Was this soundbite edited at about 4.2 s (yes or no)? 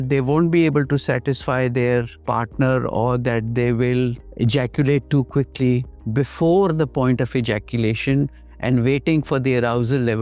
yes